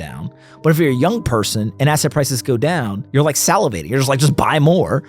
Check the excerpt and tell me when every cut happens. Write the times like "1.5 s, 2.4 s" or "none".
3.0 s